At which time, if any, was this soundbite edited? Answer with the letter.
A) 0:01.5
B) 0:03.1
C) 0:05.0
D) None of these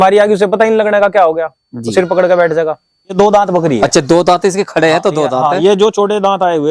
B